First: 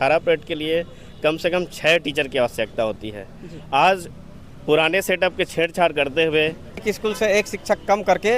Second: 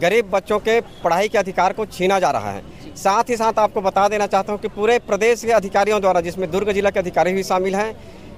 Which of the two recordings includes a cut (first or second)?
first